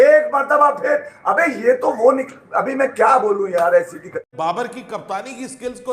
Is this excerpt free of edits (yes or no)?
yes